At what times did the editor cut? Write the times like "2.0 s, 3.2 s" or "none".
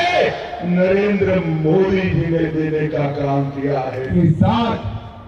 4.1 s